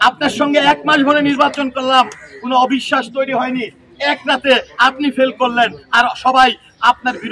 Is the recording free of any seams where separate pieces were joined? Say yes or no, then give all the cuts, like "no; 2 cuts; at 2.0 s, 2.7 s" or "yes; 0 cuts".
yes; 0 cuts